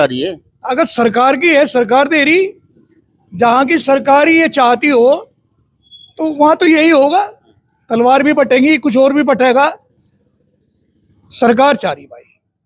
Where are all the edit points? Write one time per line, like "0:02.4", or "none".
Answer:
none

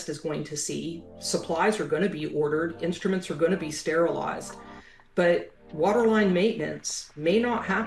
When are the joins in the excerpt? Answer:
none

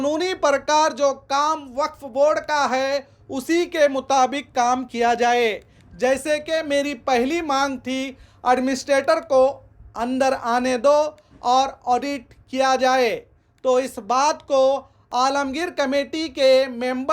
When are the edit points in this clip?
none

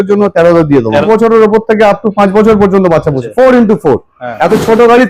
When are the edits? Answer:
0:01.0
0:03.2

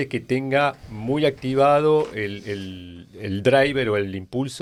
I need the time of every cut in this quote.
none

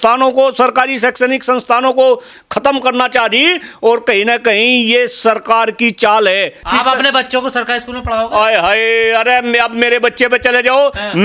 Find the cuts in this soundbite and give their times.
0:06.6

